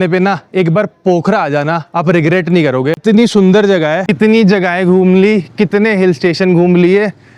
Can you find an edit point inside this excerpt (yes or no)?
yes